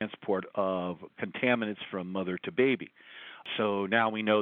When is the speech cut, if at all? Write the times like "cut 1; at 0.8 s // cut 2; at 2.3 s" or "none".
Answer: none